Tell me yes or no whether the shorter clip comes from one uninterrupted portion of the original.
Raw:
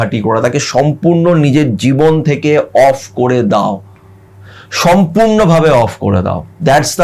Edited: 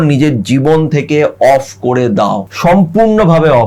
no